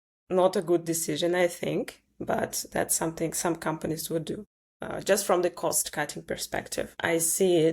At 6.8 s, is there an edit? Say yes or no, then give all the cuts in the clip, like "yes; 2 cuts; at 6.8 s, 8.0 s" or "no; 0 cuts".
yes; 1 cut; at 6.8 s